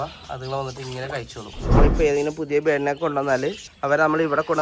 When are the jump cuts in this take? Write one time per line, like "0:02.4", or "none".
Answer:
0:01.8
0:03.7